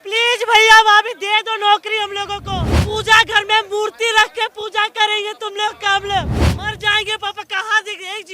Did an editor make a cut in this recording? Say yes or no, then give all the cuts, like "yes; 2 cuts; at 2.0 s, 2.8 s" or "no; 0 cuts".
yes; 2 cuts; at 2.7 s, 6.4 s